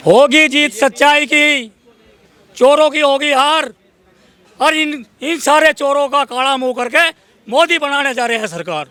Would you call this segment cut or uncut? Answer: uncut